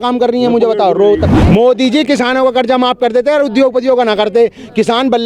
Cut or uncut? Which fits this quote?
cut